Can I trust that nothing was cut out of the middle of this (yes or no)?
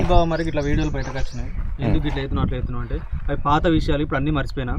yes